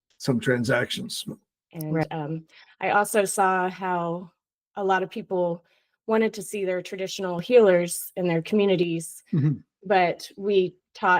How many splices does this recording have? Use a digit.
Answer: 1